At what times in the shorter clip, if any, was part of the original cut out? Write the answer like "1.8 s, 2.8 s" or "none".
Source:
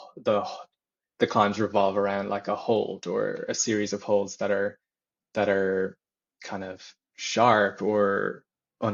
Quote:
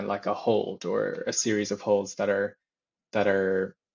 none